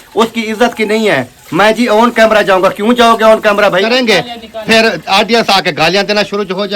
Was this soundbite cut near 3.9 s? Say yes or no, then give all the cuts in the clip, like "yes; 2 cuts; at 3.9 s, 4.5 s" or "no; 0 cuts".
yes; 1 cut; at 3.9 s